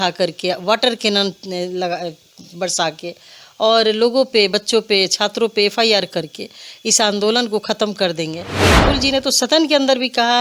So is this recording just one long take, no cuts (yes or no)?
no